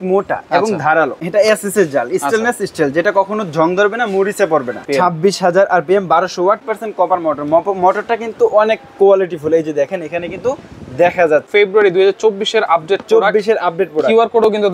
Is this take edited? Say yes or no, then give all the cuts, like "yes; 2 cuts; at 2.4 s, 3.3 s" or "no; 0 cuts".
yes; 4 cuts; at 1.2 s, 4.8 s, 6.6 s, 11.5 s